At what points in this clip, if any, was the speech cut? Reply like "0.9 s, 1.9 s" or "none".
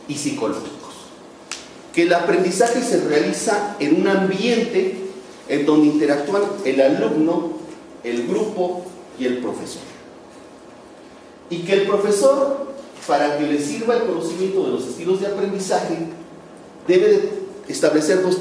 10.0 s